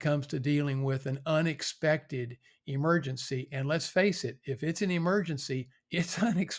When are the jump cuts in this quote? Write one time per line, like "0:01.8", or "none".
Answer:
none